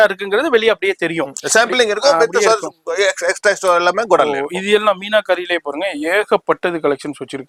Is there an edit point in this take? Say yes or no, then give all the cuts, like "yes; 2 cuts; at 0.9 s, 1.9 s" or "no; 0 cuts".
no; 0 cuts